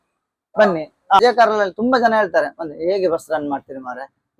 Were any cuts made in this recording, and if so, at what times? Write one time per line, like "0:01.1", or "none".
0:01.2